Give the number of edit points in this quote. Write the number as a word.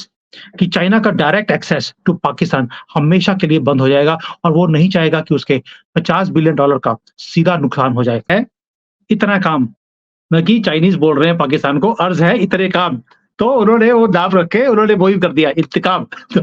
one